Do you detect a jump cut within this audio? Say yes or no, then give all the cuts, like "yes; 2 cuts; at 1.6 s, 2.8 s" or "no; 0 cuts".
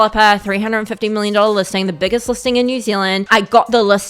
yes; 1 cut; at 3.2 s